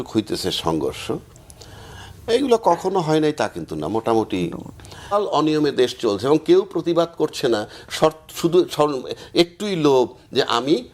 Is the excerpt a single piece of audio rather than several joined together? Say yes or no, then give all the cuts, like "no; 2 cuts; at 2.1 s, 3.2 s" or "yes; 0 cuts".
no; 1 cut; at 5.1 s